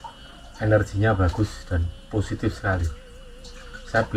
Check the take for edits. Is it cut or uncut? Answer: uncut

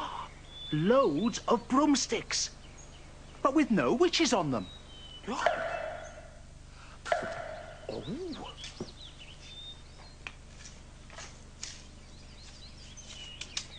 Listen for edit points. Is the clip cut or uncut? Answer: uncut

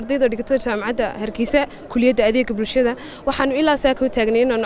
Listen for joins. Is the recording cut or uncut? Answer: uncut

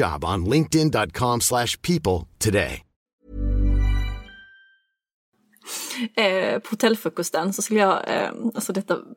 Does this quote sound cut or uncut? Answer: cut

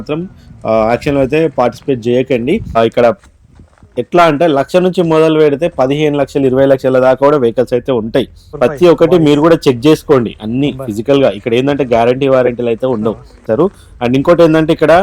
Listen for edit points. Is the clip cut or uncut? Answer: cut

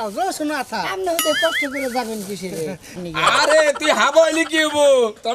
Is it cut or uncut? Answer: cut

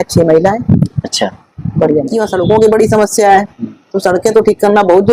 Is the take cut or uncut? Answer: cut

